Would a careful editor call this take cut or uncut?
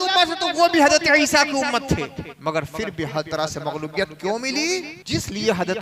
cut